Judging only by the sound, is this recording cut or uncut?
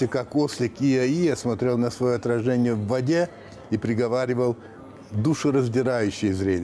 uncut